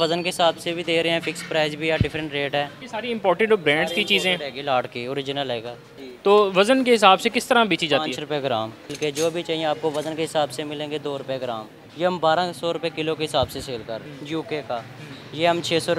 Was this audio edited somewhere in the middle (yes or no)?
yes